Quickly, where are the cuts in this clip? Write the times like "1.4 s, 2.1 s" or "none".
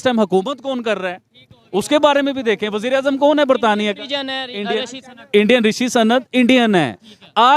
none